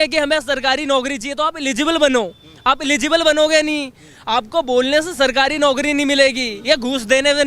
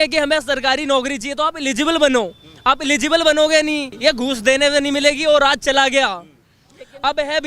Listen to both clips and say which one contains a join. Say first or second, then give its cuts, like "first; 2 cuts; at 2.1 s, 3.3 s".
second; 1 cut; at 3.9 s